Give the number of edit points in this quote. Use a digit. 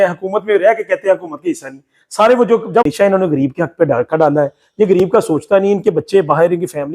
1